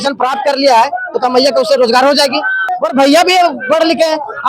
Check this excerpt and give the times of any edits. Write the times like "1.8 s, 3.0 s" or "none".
2.7 s